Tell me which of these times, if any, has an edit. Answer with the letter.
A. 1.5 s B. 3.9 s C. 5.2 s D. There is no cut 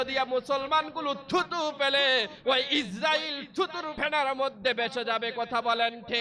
B